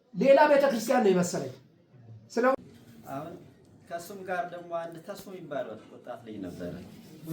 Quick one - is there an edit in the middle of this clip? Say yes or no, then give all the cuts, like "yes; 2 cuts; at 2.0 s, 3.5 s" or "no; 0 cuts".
yes; 1 cut; at 2.5 s